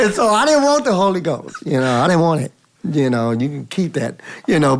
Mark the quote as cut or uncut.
uncut